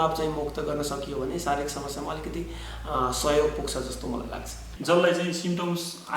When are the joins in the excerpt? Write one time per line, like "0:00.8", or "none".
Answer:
0:04.7